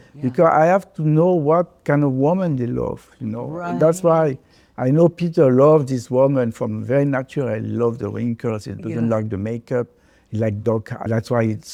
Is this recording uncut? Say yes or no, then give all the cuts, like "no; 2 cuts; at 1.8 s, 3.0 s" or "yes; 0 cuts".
yes; 0 cuts